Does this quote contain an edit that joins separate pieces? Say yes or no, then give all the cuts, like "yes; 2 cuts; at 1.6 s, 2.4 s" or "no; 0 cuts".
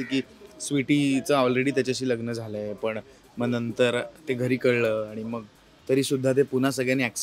no; 0 cuts